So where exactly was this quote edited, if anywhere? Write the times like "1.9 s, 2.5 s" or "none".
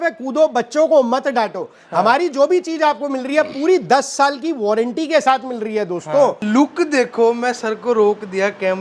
6.4 s